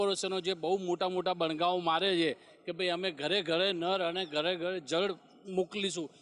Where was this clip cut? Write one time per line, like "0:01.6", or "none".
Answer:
none